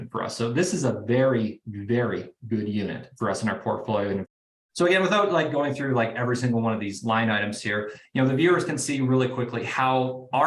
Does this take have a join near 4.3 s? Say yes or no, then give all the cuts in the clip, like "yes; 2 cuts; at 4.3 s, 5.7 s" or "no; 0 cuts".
yes; 1 cut; at 4.3 s